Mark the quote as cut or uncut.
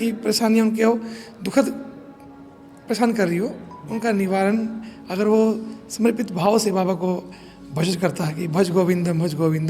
uncut